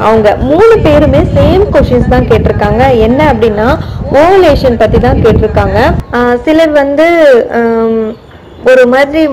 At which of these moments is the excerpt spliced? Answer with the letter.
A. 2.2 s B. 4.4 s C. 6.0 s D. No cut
C